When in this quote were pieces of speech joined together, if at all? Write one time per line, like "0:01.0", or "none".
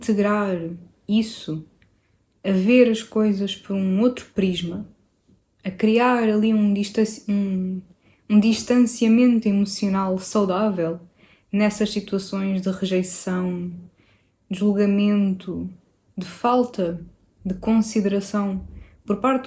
none